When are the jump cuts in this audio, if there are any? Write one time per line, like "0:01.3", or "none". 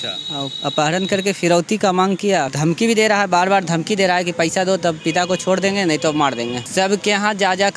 0:02.5
0:06.6